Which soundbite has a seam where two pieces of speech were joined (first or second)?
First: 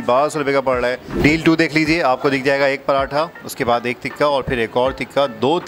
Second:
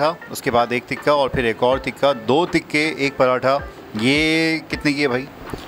first